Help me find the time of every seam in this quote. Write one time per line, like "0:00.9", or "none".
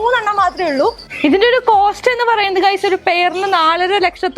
0:01.1